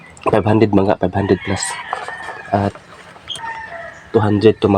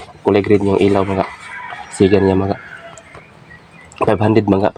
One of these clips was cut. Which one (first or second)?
first